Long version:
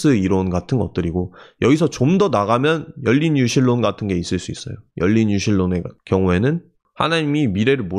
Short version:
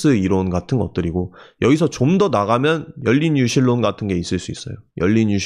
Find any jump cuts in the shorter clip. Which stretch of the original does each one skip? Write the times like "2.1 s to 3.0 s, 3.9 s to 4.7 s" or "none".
none